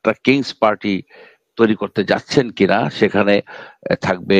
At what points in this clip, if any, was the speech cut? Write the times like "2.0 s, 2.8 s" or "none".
none